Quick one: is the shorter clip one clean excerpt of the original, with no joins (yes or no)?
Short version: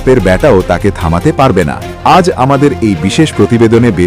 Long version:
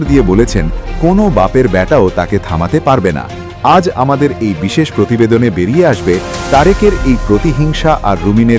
no